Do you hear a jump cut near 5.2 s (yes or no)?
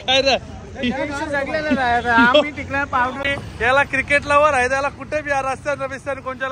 no